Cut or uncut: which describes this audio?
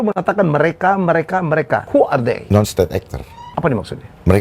cut